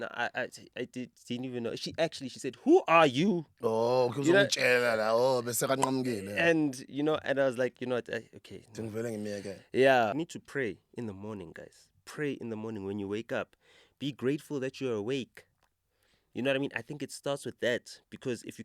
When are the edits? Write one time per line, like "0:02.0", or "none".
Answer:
0:10.1